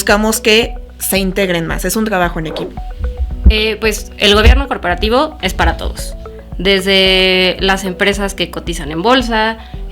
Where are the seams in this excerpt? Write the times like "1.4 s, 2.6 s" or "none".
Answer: 2.6 s

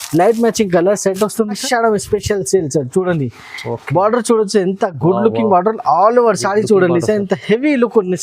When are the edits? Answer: 1.6 s

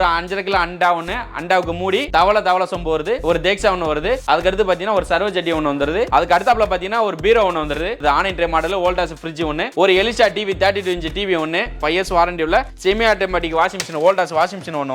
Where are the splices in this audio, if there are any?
6.1 s, 8.0 s, 11.7 s

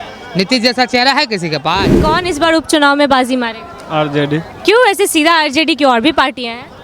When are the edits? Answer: 2.0 s

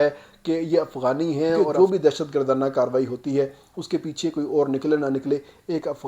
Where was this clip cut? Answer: 1.5 s

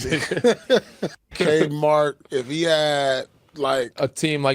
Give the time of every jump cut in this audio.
1.3 s

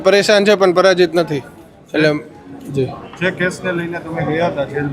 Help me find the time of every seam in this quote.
none

